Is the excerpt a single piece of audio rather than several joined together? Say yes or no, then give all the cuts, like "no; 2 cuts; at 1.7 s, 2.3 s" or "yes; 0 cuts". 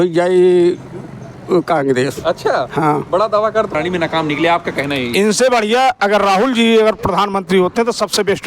no; 1 cut; at 3.7 s